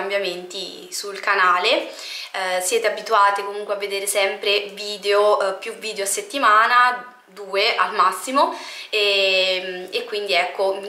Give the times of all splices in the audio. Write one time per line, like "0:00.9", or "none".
none

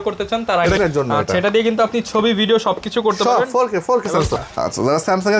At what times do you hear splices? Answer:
0:00.8
0:04.3

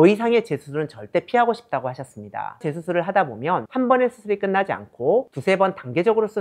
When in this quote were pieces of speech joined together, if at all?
0:02.6

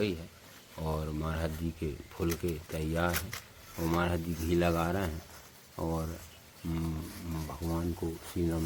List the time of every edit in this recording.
none

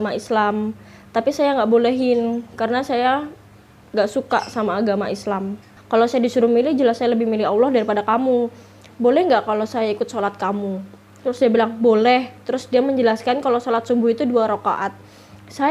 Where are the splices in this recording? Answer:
0:05.7
0:08.9

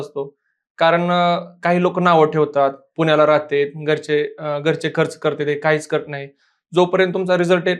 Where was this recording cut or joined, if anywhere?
none

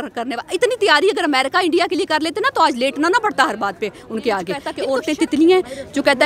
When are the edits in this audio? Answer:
0:04.7

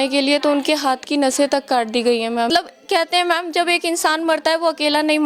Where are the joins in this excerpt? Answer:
0:02.5

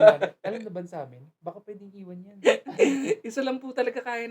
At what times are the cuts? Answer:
none

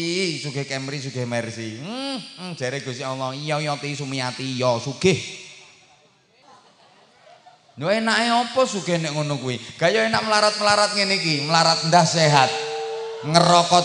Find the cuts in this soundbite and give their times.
0:06.4

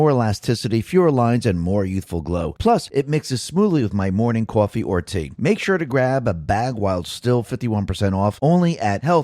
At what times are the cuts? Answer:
0:04.6

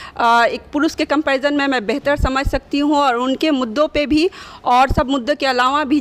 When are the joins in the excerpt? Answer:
none

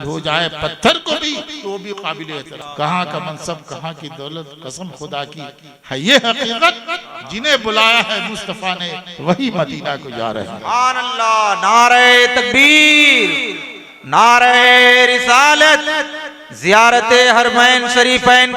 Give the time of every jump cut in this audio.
0:02.6

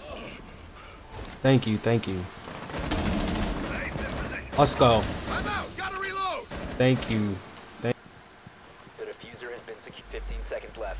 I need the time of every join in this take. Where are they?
0:07.9

